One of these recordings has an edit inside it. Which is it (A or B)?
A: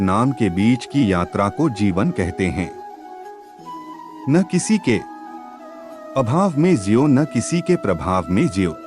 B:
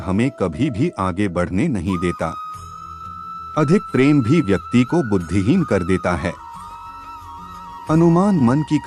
A